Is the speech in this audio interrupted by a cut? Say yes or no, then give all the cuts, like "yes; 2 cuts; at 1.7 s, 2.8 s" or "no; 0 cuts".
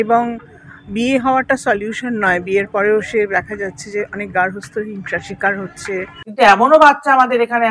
yes; 1 cut; at 6.2 s